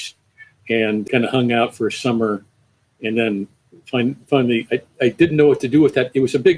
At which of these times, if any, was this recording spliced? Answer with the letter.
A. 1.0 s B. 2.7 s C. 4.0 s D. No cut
A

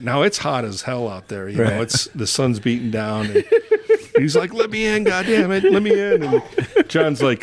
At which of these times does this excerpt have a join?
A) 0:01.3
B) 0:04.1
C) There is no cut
C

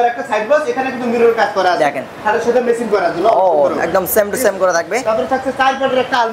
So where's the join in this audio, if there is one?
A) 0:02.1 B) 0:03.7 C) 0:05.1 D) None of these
D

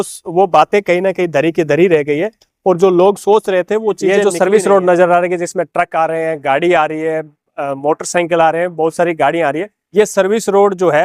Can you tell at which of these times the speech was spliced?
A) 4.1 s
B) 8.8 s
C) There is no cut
A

